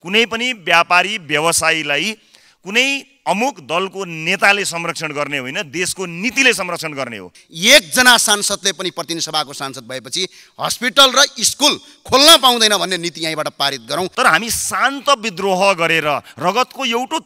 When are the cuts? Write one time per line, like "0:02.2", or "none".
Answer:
0:07.4
0:14.1